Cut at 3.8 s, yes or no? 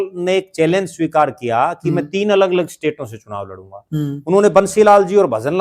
no